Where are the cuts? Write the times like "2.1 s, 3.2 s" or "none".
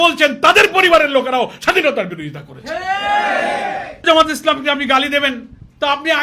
4.0 s

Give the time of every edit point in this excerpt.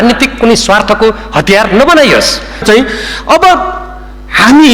2.6 s

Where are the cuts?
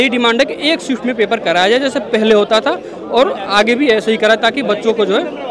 none

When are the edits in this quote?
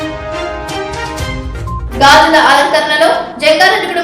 1.8 s

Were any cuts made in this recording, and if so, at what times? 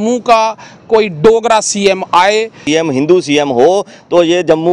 2.6 s

